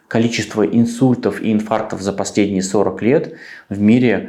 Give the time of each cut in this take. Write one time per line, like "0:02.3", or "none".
none